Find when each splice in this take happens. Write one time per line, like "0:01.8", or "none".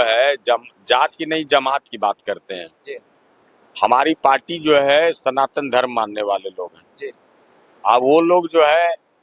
none